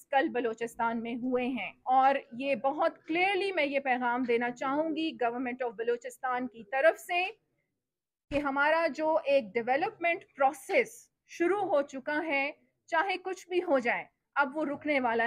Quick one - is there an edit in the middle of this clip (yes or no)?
yes